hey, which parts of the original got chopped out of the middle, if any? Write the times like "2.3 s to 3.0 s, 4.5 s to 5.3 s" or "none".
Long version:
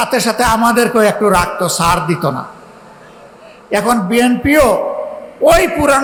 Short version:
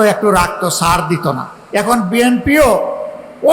2.5 s to 3.5 s